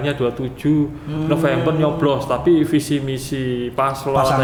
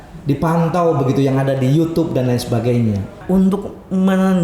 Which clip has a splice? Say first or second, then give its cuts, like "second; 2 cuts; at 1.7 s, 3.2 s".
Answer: second; 1 cut; at 3.2 s